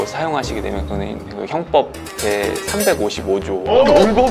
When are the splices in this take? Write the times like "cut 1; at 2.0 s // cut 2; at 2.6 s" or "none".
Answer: none

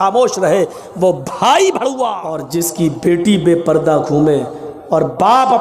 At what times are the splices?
cut 1; at 2.5 s

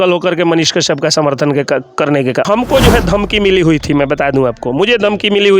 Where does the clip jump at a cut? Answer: cut 1; at 2.4 s

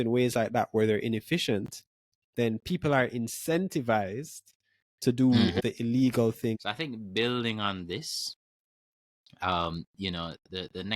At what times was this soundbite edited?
cut 1; at 5.6 s // cut 2; at 6.6 s

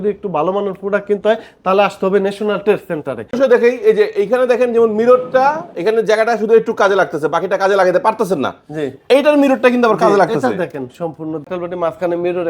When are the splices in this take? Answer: cut 1; at 3.3 s // cut 2; at 11.5 s

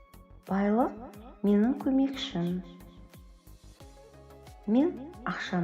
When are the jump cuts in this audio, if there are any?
cut 1; at 3.0 s // cut 2; at 4.6 s

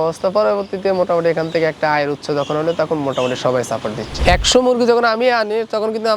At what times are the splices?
cut 1; at 4.1 s

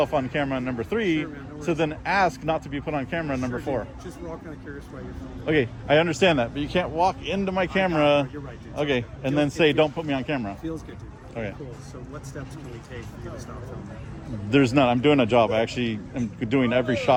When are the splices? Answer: none

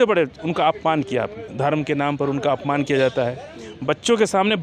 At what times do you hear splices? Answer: cut 1; at 1.4 s

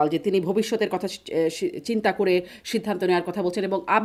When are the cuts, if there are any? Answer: none

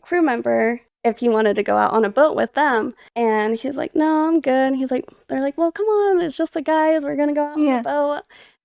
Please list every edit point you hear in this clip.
cut 1; at 0.9 s // cut 2; at 2.5 s

